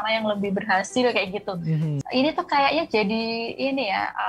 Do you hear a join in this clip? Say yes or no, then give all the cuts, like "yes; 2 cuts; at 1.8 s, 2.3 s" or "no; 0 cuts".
yes; 1 cut; at 2.0 s